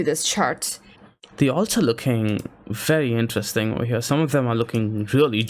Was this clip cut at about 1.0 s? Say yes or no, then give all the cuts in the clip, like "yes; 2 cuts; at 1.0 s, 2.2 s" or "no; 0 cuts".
yes; 1 cut; at 1.0 s